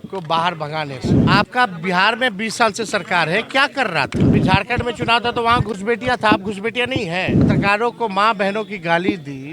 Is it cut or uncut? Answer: cut